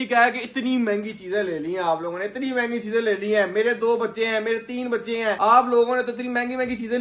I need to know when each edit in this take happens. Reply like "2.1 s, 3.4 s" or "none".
none

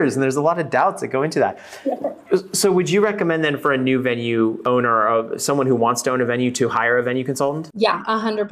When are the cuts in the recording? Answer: 4.6 s, 7.7 s

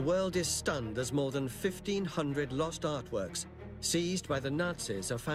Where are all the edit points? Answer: none

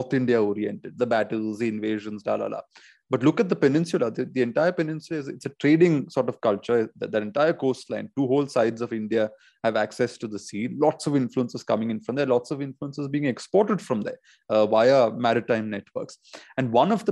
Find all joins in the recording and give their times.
none

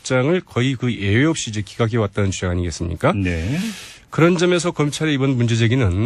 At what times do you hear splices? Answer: none

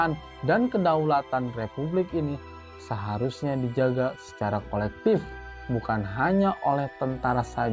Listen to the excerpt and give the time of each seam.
none

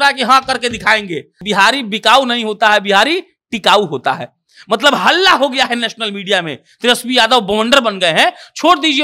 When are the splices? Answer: 1.3 s

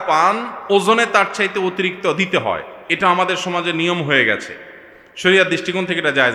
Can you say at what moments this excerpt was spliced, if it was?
none

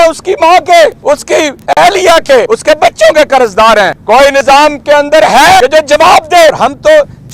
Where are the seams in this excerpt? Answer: 1.4 s, 2.5 s, 4.2 s, 5.6 s, 6.6 s

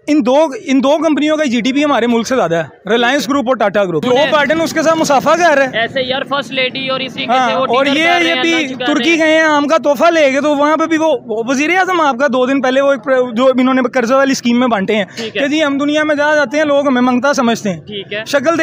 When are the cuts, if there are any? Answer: 4.0 s

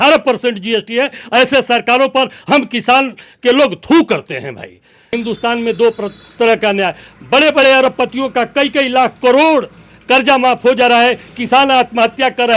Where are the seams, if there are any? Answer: 5.1 s

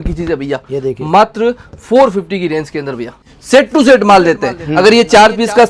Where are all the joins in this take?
3.3 s

